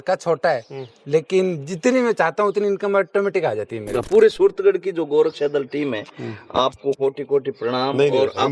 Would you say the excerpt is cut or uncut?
cut